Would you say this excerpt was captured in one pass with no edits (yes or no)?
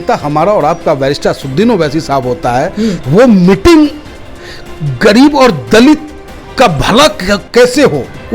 no